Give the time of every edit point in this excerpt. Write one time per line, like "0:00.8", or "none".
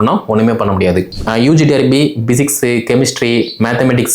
0:01.2